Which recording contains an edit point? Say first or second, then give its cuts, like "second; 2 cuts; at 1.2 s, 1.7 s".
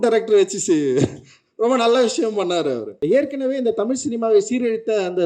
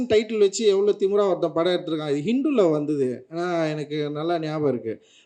first; 1 cut; at 2.9 s